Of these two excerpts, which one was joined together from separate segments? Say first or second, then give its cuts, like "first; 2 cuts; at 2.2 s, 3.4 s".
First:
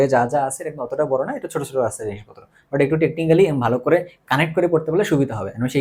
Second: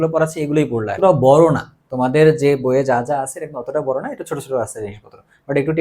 second; 1 cut; at 1.0 s